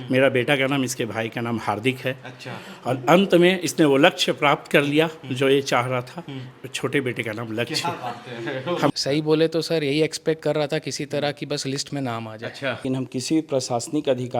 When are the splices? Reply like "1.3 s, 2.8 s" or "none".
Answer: 8.9 s, 12.8 s